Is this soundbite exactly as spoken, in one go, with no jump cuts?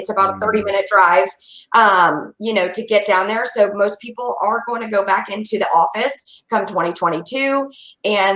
yes; 0 cuts

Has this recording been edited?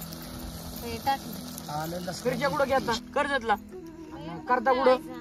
yes; 1 cut; at 2.2 s

